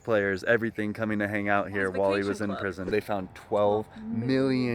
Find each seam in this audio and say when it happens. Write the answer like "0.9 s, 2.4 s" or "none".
2.9 s